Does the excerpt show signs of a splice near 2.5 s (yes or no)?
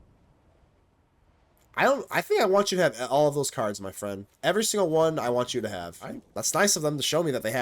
no